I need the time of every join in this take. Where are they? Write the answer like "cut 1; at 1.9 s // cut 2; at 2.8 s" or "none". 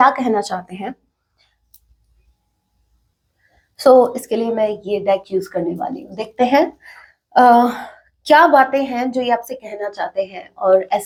none

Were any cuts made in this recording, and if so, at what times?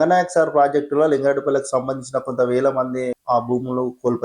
cut 1; at 3.2 s

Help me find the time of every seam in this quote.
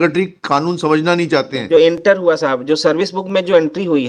none

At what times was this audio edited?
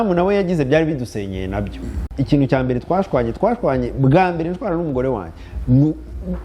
cut 1; at 2.1 s

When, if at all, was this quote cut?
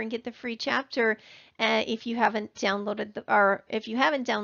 cut 1; at 2.8 s

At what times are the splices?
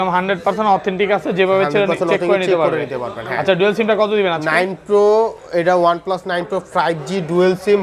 none

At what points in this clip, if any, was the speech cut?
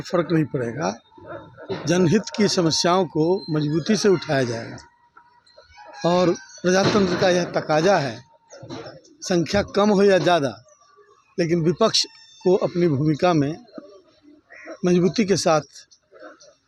none

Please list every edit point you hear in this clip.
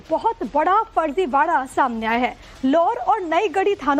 cut 1; at 1.9 s

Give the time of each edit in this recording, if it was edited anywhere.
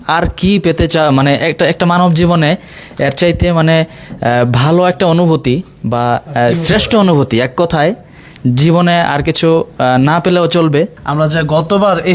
cut 1; at 11.0 s

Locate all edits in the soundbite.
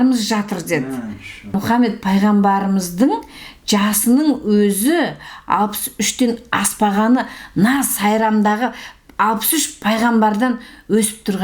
cut 1; at 1.5 s

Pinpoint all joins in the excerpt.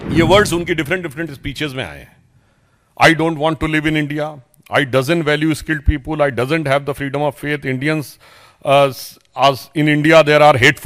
none

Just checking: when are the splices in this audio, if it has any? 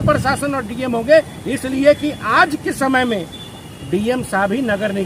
none

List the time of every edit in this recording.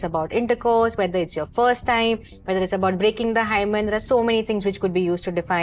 none

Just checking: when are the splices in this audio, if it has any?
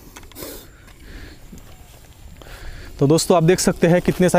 cut 1; at 1.5 s

